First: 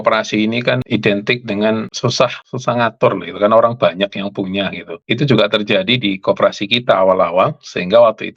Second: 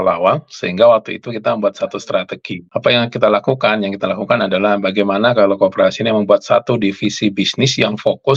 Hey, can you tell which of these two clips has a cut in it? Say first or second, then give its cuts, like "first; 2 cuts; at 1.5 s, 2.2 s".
first; 3 cuts; at 0.8 s, 2.2 s, 4.9 s